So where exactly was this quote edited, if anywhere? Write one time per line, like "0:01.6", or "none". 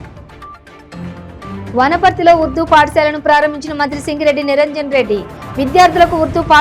none